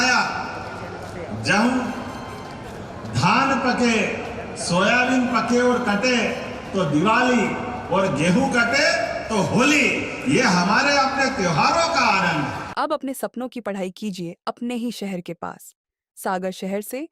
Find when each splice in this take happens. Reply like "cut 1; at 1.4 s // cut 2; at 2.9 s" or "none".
cut 1; at 12.6 s